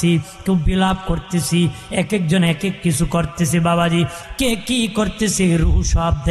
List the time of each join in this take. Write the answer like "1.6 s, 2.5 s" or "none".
4.2 s